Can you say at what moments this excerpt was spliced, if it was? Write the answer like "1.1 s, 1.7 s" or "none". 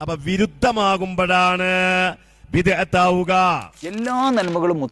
4.0 s